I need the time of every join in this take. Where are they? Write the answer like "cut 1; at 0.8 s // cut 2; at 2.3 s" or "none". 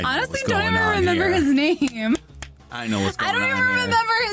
none